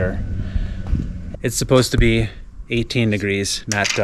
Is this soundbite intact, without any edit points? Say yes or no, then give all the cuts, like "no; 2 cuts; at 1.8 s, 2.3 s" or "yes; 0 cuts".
no; 1 cut; at 1.2 s